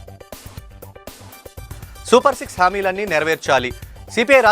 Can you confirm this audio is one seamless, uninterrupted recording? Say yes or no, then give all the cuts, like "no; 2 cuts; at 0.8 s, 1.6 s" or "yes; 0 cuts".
no; 1 cut; at 1.9 s